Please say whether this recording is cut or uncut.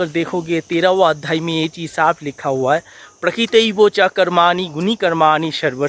uncut